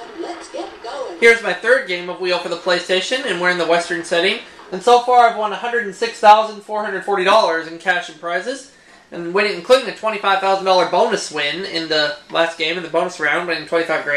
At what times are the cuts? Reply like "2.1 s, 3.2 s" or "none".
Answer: 13.2 s